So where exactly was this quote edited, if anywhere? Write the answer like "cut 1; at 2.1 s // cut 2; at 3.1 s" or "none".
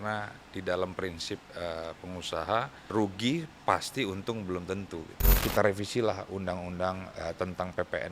cut 1; at 2.9 s // cut 2; at 5.2 s

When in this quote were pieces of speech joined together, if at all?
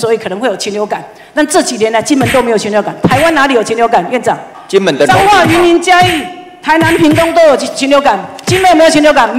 cut 1; at 4.5 s

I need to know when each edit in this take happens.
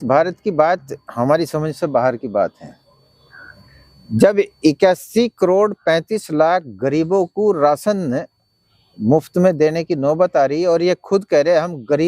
none

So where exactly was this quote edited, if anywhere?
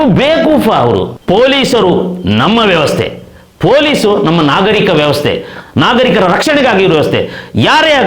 cut 1; at 1.1 s

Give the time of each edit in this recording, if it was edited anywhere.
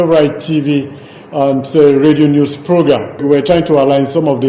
cut 1; at 3.2 s

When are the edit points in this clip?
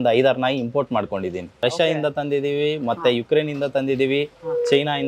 cut 1; at 1.5 s

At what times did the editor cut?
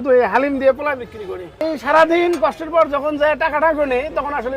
cut 1; at 1.5 s

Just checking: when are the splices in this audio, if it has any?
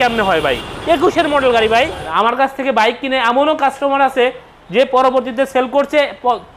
cut 1; at 2.0 s

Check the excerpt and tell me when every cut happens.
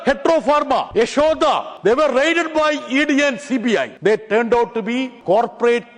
cut 1; at 0.9 s // cut 2; at 1.7 s // cut 3; at 3.9 s // cut 4; at 5.1 s

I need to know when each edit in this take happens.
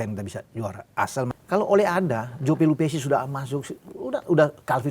cut 1; at 1.3 s

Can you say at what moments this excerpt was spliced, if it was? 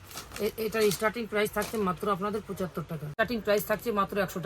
cut 1; at 3.1 s

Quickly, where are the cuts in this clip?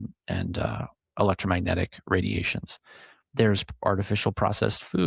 none

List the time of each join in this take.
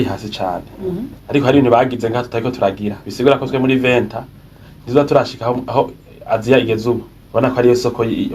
cut 1; at 1.2 s // cut 2; at 7.1 s

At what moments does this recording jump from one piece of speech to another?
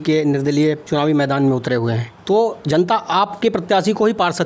cut 1; at 0.8 s // cut 2; at 2.1 s

